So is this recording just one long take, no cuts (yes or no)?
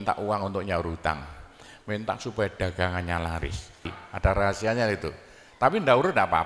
no